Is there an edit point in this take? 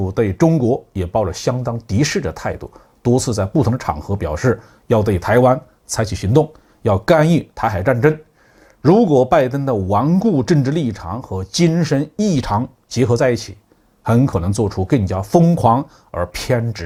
no; 0 cuts

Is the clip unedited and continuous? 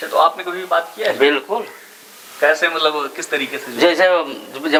yes; 0 cuts

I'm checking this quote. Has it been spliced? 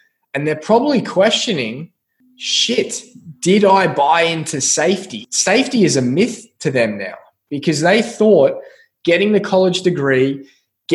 yes; 1 cut; at 5.2 s

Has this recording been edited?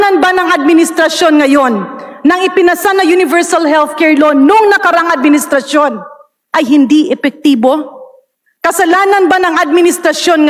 no; 0 cuts

